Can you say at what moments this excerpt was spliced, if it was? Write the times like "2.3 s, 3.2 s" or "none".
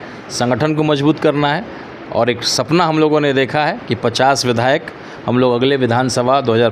none